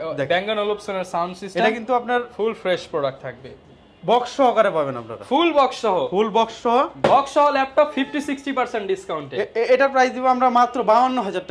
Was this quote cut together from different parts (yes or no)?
no